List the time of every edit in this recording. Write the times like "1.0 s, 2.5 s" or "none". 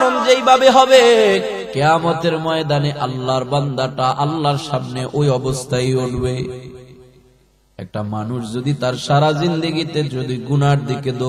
1.6 s